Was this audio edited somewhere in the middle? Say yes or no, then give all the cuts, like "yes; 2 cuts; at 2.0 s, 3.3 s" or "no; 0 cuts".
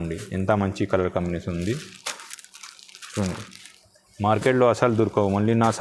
no; 0 cuts